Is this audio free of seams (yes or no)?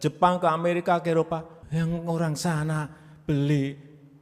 no